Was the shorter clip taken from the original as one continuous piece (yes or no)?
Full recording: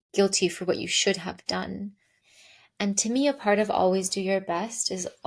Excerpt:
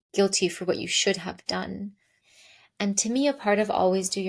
yes